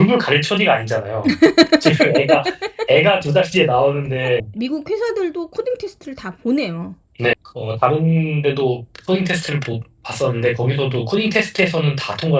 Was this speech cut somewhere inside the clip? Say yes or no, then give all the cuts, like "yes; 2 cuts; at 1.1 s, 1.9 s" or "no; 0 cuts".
yes; 2 cuts; at 4.5 s, 7.3 s